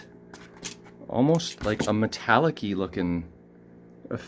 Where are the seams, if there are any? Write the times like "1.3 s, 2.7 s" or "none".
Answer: none